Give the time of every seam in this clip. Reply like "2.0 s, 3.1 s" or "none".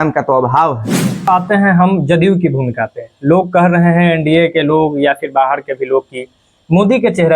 1.2 s